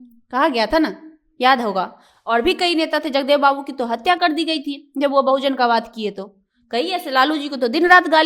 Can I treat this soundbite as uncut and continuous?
yes; 0 cuts

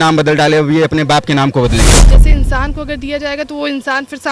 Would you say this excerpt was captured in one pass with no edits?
no; 1 cut; at 2.2 s

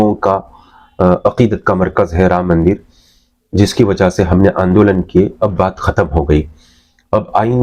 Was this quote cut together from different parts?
no; 0 cuts

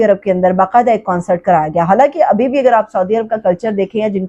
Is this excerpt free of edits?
yes; 0 cuts

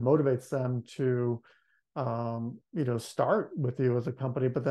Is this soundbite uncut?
yes; 0 cuts

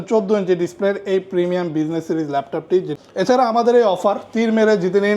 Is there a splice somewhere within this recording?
yes; 1 cut; at 3.0 s

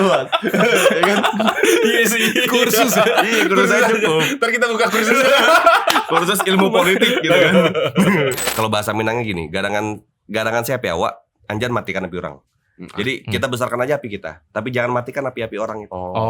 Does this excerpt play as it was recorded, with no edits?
no; 1 cut; at 8.4 s

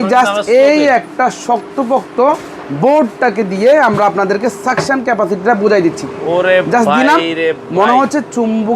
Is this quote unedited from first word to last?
yes; 0 cuts

